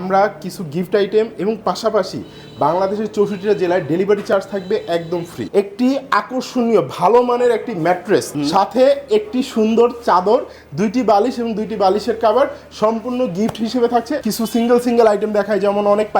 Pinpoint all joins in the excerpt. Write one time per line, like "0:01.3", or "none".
0:05.5
0:08.4
0:14.2